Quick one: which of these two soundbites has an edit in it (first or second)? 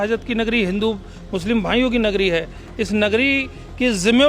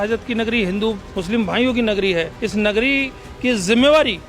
second